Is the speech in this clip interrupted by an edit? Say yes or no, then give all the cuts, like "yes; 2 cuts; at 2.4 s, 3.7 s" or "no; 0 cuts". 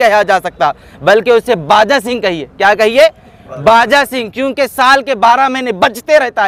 no; 0 cuts